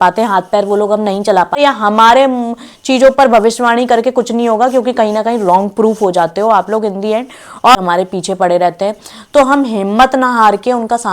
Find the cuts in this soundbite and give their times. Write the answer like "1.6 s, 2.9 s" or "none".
1.6 s, 7.8 s